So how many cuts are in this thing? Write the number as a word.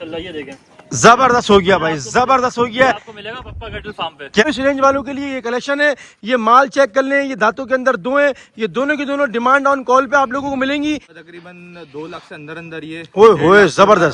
two